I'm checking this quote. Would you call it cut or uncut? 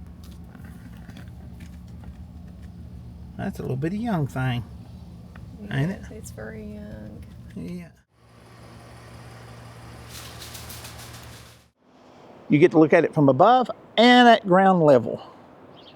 cut